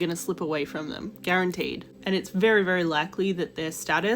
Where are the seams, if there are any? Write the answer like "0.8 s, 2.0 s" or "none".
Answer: 1.9 s